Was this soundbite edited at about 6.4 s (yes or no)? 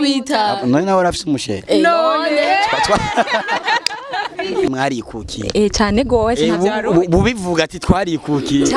no